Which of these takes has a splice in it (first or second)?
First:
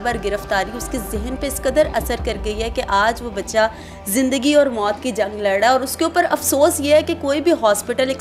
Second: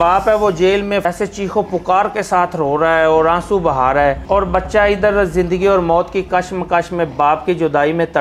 second